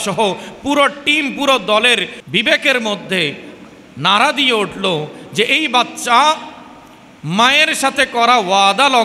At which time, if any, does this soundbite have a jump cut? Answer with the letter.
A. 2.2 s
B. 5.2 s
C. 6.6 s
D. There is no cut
A